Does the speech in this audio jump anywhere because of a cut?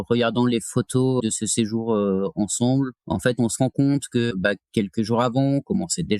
yes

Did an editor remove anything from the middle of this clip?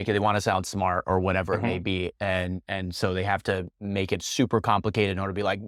no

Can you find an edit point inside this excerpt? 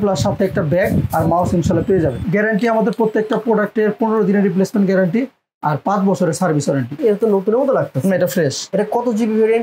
yes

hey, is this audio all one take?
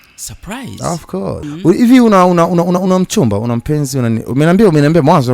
no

